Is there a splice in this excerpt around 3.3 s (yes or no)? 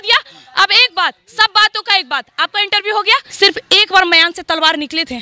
yes